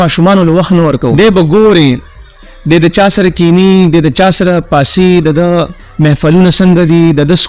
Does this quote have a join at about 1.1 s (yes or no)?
yes